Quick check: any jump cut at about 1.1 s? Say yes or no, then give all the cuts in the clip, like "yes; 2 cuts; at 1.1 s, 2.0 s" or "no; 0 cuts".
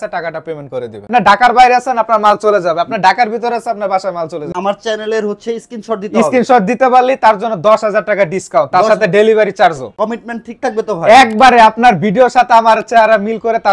yes; 3 cuts; at 1.1 s, 4.5 s, 9.9 s